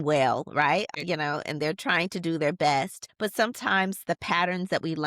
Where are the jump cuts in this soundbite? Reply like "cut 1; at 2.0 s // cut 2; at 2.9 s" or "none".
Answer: cut 1; at 0.9 s // cut 2; at 3.0 s